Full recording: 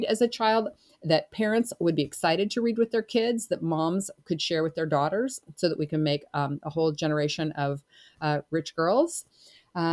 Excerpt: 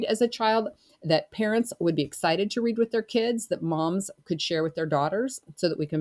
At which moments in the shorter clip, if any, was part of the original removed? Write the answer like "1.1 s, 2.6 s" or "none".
none